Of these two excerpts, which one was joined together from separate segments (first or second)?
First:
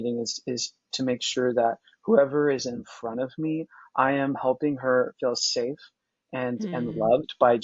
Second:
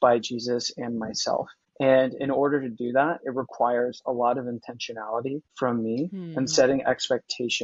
second